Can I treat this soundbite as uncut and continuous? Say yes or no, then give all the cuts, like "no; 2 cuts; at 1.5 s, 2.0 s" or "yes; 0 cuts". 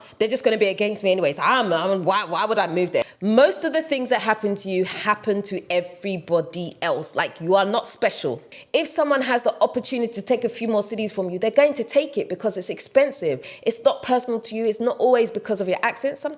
no; 3 cuts; at 3.0 s, 8.5 s, 13.5 s